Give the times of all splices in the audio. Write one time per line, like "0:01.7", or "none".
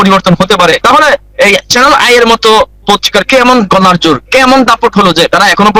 none